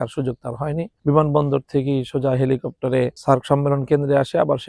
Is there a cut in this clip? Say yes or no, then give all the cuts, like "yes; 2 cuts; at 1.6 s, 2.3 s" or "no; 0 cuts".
no; 0 cuts